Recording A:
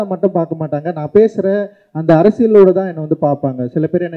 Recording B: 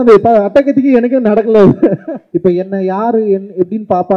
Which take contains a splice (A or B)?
B